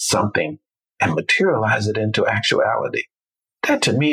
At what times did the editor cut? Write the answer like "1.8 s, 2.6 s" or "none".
none

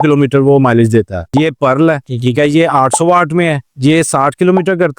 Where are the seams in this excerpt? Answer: 1.2 s

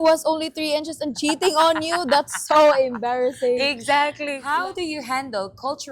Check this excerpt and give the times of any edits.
4.4 s

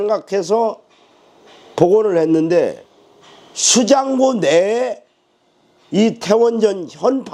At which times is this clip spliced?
none

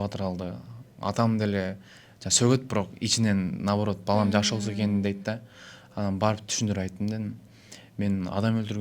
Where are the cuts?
none

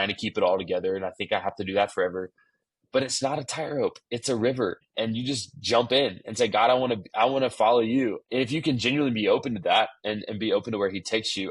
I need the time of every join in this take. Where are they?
4.9 s, 8.2 s

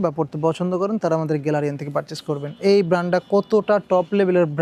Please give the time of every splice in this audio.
none

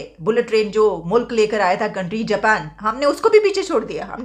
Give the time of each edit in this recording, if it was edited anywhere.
none

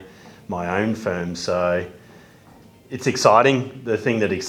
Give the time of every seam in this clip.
none

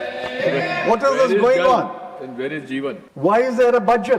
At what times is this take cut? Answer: 3.0 s

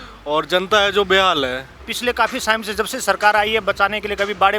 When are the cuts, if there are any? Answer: 1.7 s

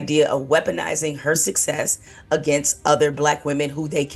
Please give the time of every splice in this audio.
none

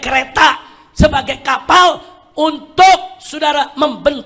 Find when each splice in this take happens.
none

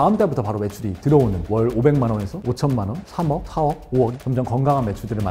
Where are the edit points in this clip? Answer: 1.4 s, 4.1 s

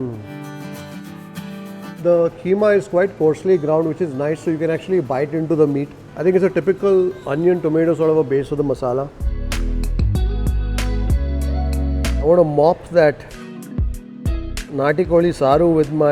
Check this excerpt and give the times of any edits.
1.9 s, 9.3 s

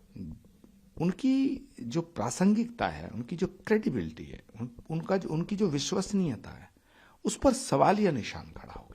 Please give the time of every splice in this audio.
none

